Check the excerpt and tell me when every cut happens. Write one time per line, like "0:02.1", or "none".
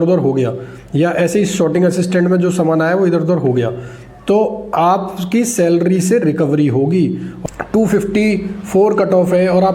0:07.3

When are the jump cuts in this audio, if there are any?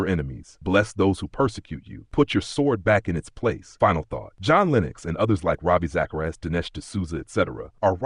none

